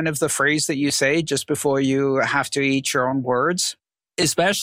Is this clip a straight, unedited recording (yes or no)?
no